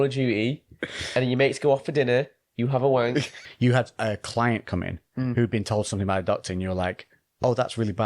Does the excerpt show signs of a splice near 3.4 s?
yes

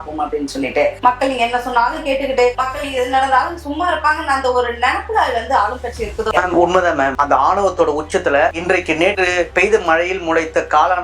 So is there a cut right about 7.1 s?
yes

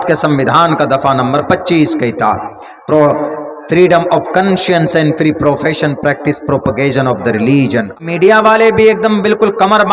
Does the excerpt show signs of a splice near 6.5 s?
no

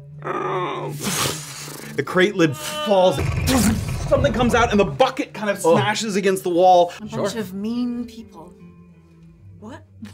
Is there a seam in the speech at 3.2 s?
yes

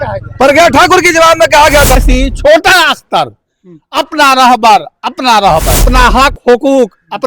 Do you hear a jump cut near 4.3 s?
no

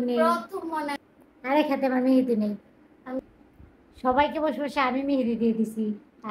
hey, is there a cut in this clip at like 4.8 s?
no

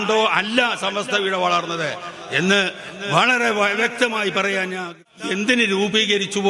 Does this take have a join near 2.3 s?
no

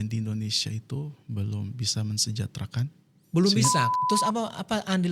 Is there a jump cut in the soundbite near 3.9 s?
yes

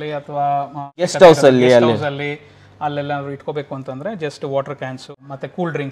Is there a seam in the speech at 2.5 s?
no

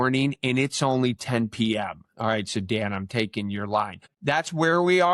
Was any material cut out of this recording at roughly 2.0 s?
no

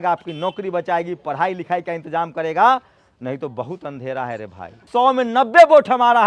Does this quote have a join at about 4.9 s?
yes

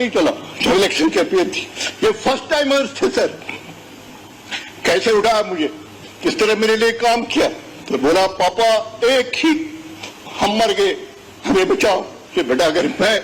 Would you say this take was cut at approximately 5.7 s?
no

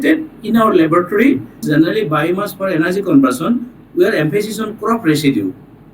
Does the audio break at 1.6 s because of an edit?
yes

